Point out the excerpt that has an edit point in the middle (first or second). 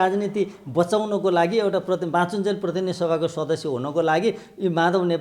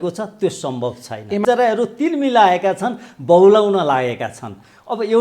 second